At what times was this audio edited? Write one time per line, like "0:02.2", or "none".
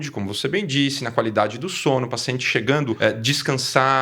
0:03.0